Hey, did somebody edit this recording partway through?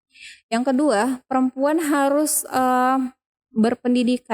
no; 0 cuts

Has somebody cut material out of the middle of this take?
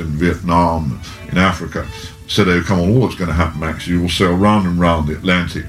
no; 0 cuts

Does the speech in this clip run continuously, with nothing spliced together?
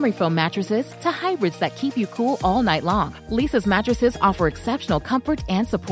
yes; 0 cuts

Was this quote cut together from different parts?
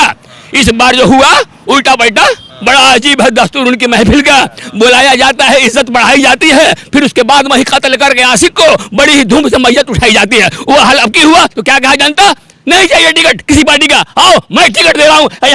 no; 0 cuts

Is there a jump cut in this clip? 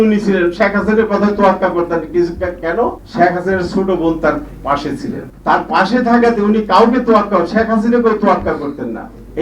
yes; 2 cuts; at 3.0 s, 5.3 s

